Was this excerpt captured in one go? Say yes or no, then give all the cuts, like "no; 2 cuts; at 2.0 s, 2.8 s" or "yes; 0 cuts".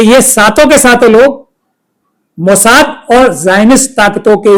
yes; 0 cuts